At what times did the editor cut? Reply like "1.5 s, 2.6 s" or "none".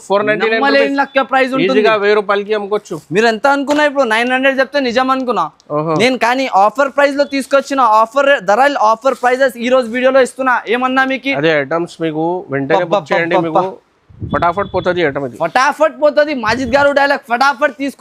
none